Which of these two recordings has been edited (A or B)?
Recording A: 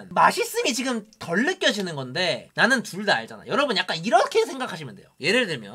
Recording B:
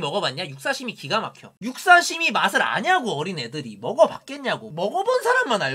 B